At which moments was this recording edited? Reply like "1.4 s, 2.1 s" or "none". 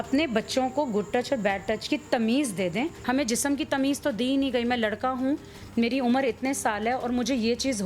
3.0 s

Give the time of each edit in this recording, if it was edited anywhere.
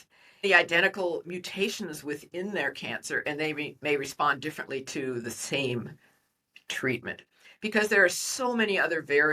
none

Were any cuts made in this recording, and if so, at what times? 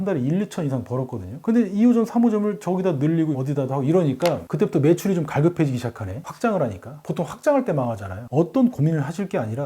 3.3 s, 8.2 s

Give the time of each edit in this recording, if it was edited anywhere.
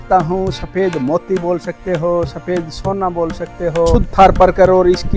4.0 s

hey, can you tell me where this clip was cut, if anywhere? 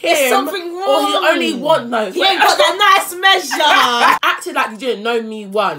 4.2 s

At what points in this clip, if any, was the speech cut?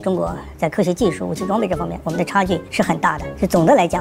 none

